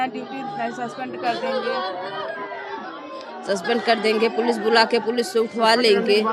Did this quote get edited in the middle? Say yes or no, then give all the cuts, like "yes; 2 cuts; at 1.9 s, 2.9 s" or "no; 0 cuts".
no; 0 cuts